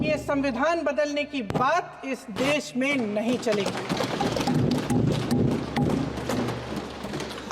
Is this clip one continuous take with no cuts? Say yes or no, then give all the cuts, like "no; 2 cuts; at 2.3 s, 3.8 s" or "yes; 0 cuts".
yes; 0 cuts